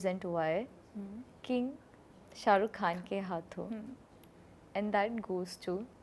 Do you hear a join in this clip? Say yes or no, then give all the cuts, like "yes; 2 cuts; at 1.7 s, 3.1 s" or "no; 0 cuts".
no; 0 cuts